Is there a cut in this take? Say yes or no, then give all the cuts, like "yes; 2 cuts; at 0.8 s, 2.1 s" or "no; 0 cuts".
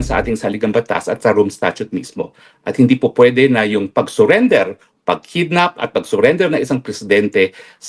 no; 0 cuts